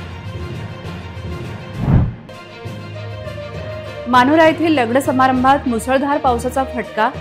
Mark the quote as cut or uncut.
cut